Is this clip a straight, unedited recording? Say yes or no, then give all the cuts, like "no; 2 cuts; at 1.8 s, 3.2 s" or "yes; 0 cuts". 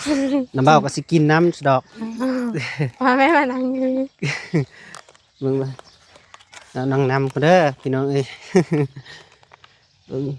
yes; 0 cuts